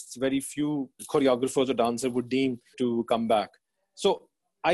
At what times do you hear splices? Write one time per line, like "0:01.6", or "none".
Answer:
0:01.0
0:02.7